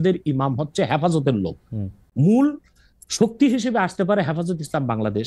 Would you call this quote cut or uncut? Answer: cut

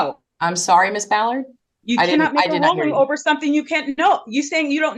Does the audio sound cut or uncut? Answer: uncut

